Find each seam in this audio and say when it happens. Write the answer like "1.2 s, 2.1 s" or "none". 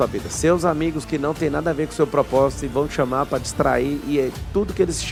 none